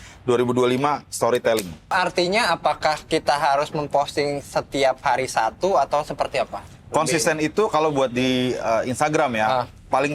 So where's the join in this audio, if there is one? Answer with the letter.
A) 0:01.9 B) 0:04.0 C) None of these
A